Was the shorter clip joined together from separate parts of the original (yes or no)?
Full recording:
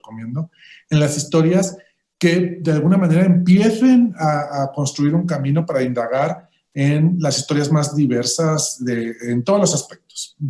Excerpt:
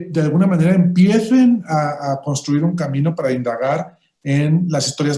no